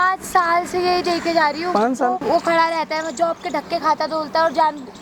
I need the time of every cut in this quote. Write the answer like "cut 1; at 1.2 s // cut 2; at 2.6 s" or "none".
cut 1; at 2.2 s